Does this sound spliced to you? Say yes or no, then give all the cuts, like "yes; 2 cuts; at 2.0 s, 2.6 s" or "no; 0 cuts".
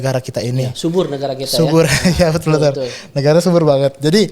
no; 0 cuts